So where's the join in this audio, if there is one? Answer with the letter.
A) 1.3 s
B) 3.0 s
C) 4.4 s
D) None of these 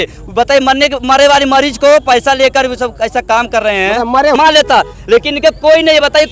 C